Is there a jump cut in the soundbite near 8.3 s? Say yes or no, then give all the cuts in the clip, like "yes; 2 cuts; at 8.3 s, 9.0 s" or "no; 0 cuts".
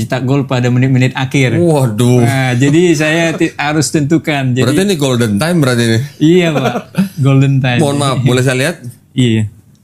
no; 0 cuts